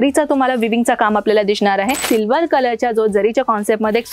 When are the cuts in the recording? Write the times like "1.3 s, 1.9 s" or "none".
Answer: 2.0 s